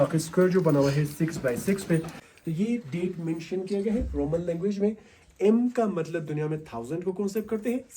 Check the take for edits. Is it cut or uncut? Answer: cut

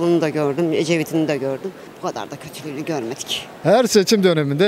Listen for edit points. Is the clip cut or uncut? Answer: cut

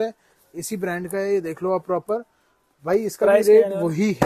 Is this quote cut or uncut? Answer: uncut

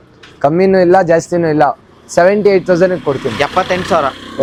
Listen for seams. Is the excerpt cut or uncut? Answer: uncut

